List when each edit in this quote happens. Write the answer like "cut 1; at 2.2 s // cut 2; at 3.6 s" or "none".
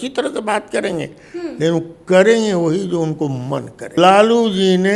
cut 1; at 4.0 s